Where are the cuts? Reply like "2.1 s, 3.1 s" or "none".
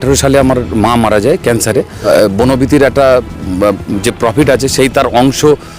2.1 s

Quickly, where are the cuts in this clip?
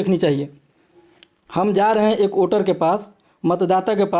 none

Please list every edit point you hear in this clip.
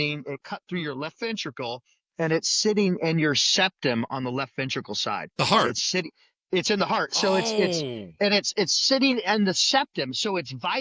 none

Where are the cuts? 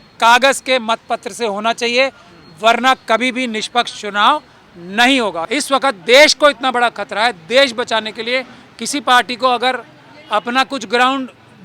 5.5 s

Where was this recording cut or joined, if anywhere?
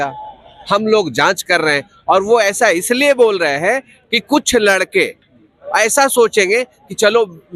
none

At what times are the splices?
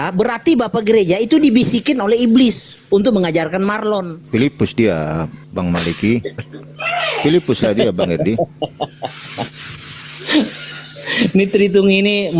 4.2 s, 5.4 s

